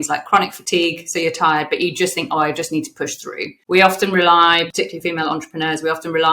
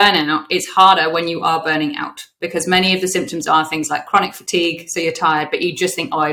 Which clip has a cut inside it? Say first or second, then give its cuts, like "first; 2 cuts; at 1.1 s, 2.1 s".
first; 2 cuts; at 3.5 s, 4.7 s